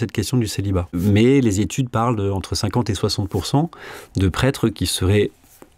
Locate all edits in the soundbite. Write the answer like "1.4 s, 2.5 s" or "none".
0.9 s